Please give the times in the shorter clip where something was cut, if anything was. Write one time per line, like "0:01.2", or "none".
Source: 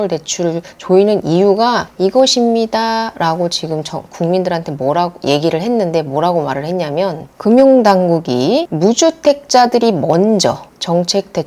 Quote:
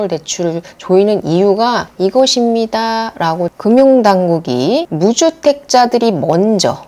0:03.5